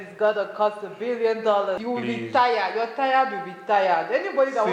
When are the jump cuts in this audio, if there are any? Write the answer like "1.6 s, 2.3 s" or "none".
1.8 s

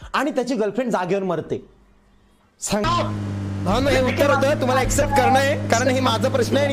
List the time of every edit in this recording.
2.8 s

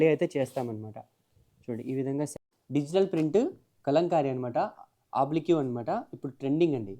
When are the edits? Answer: 2.4 s

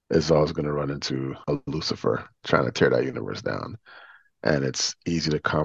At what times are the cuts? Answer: 1.4 s, 2.3 s

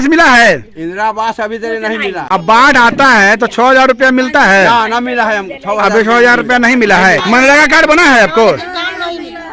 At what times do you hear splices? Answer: 2.2 s, 7.2 s

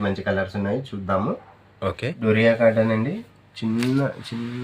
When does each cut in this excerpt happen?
2.2 s

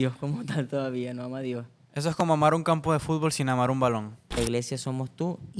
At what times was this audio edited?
4.4 s

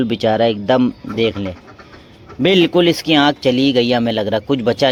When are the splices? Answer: none

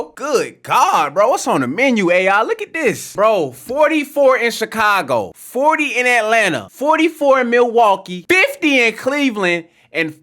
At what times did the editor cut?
3.1 s, 5.4 s, 6.7 s, 8.1 s

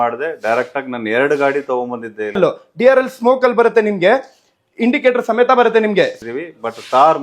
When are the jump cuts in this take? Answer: 2.4 s, 6.1 s

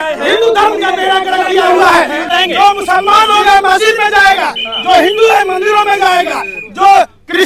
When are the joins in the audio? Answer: 2.3 s

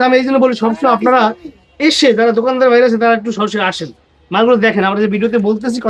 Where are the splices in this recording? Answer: none

